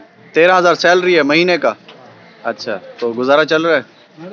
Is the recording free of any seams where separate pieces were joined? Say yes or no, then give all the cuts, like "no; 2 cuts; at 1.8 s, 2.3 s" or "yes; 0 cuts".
yes; 0 cuts